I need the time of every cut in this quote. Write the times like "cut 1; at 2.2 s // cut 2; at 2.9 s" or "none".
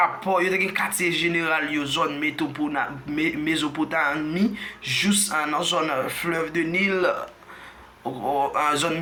none